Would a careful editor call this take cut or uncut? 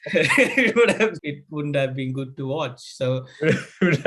cut